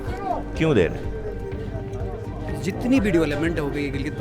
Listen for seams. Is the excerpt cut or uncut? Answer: uncut